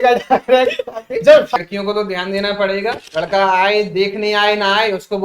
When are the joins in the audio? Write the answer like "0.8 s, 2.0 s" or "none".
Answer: 1.5 s